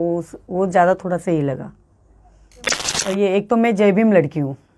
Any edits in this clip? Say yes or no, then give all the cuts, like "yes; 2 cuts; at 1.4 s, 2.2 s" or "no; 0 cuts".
yes; 1 cut; at 2.9 s